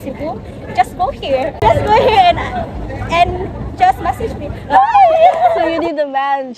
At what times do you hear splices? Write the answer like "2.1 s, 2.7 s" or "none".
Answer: 1.6 s, 5.6 s

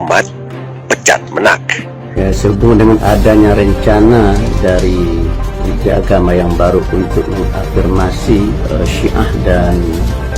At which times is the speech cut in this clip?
2.1 s

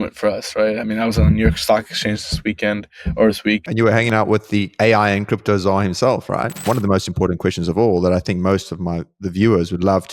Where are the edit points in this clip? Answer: 3.7 s, 6.6 s

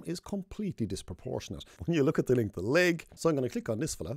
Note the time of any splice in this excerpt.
1.7 s, 3.1 s

